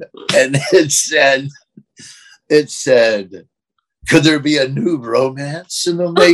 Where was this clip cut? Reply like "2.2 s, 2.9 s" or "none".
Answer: none